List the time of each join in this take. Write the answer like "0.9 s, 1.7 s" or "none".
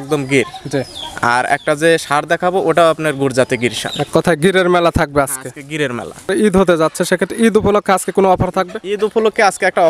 6.3 s